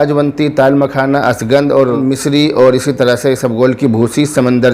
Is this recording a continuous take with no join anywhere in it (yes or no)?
no